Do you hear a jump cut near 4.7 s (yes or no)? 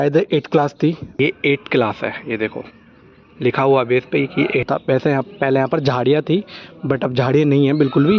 yes